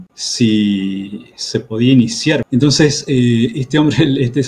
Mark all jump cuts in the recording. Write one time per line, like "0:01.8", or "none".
0:02.4